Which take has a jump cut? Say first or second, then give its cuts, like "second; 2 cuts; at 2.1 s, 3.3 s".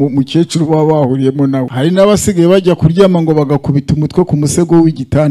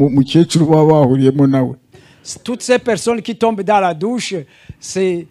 first; 1 cut; at 1.7 s